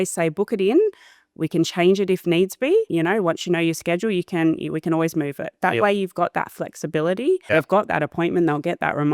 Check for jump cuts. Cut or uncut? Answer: cut